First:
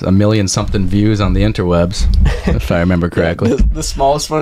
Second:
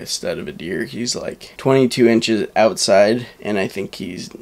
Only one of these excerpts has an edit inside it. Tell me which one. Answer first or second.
second